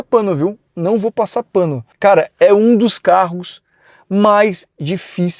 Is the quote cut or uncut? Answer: cut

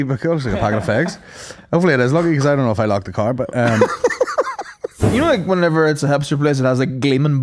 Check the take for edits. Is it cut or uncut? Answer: cut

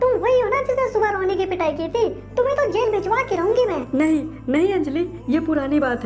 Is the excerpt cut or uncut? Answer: cut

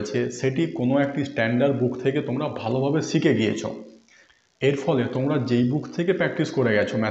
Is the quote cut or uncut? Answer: uncut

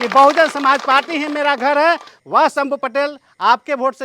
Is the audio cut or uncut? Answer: cut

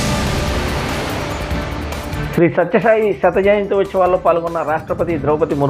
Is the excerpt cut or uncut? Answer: cut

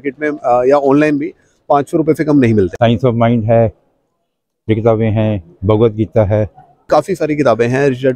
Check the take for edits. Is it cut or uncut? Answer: cut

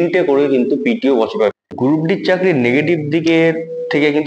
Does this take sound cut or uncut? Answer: cut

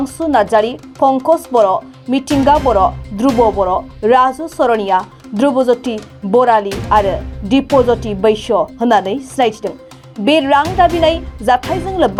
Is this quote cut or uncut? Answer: uncut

